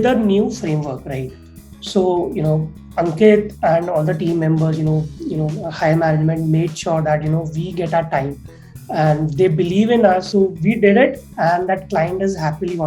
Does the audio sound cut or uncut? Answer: cut